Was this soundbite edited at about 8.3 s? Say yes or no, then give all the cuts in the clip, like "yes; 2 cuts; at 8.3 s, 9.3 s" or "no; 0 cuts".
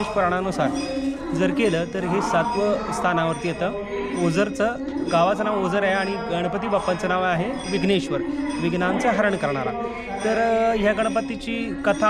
no; 0 cuts